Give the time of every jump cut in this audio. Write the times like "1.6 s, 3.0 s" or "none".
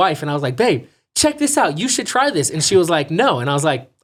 none